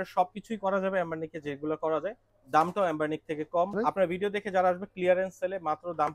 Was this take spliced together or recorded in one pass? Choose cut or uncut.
cut